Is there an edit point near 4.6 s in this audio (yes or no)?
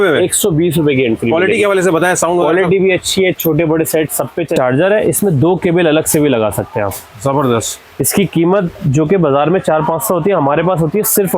yes